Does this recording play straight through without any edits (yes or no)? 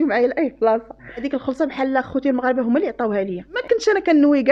no